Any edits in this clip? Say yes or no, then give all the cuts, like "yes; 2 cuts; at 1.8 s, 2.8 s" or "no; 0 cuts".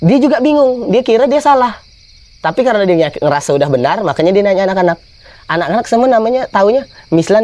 no; 0 cuts